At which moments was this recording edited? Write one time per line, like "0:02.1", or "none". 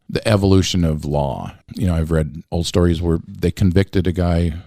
0:01.6
0:02.4